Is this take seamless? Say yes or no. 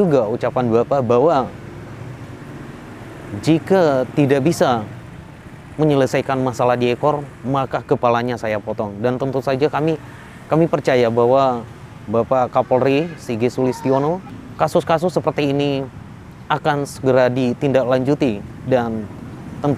yes